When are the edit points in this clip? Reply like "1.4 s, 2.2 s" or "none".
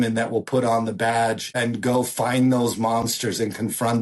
1.5 s